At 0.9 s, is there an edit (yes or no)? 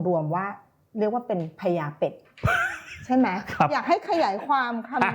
no